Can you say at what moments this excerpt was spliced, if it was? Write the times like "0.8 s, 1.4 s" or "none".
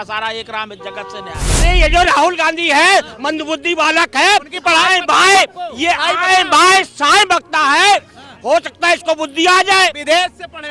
1.6 s